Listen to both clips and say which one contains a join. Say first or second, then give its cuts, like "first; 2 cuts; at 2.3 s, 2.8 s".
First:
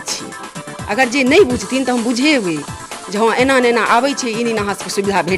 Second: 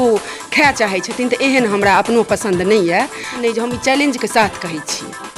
second; 1 cut; at 3.4 s